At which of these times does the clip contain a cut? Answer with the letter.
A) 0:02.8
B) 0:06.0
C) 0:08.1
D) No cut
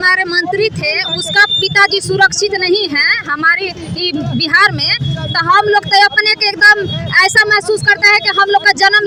D